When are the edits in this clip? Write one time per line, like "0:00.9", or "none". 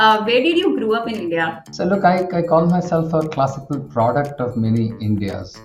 0:01.6